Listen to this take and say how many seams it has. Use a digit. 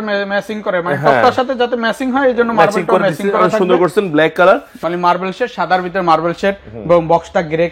1